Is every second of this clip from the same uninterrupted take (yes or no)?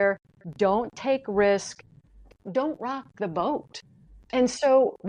no